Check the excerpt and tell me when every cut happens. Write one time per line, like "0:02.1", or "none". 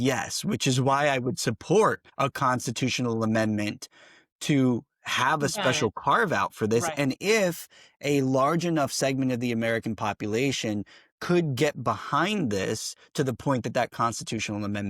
0:02.1